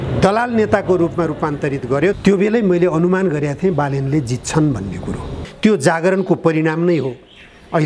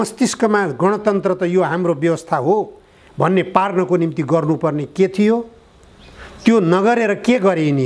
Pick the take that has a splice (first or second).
first